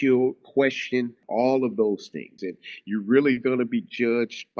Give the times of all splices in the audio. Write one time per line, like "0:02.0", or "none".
0:01.2
0:02.5